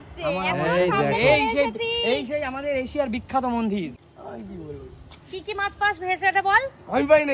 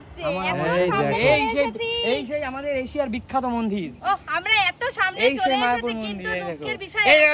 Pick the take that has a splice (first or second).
first